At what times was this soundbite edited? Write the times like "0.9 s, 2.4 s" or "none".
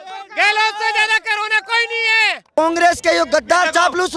2.5 s